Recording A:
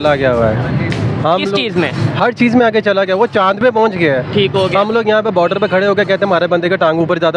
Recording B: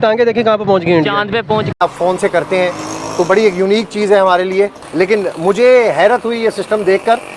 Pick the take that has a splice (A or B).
B